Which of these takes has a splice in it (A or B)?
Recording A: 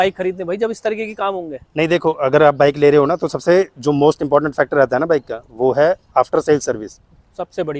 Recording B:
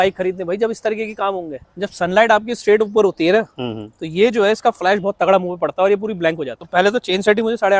B